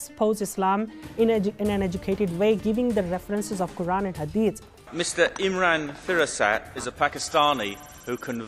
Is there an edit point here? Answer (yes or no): yes